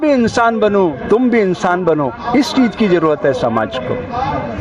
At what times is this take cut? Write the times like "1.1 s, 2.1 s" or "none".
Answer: none